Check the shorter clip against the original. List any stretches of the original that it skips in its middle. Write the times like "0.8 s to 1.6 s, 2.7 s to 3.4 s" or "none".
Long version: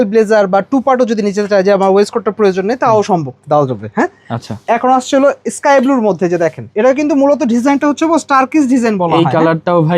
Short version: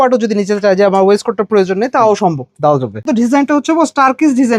3.9 s to 7.4 s